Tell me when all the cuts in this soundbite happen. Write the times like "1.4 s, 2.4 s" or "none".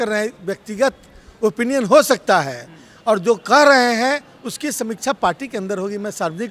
none